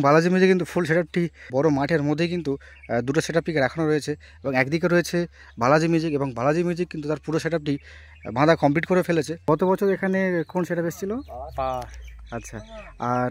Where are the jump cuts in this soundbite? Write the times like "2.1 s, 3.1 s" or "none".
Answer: 1.4 s, 9.3 s